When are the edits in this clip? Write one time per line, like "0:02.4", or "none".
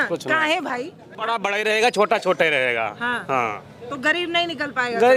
0:01.3